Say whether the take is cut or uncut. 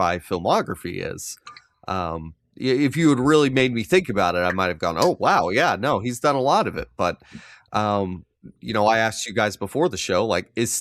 uncut